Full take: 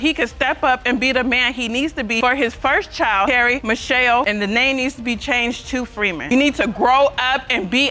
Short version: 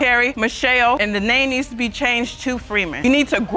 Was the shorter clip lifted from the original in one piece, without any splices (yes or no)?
yes